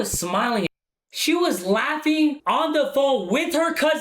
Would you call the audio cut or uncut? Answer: cut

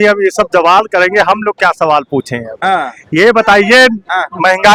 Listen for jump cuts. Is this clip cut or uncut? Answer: uncut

